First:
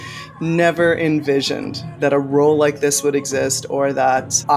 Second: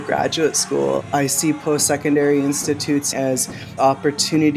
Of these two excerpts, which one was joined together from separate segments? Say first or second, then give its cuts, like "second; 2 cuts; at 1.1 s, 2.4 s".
second; 2 cuts; at 1.0 s, 3.1 s